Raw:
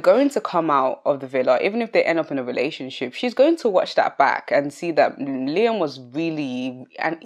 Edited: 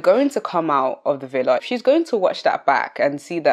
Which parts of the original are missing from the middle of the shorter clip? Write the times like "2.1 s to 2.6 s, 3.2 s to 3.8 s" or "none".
1.6 s to 3.1 s